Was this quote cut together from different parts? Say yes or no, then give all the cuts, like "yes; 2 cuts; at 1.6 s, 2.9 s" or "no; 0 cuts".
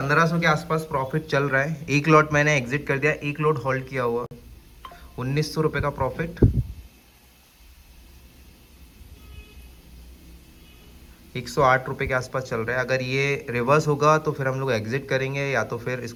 no; 0 cuts